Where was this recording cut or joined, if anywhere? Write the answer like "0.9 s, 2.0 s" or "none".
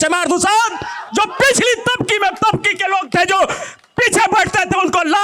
none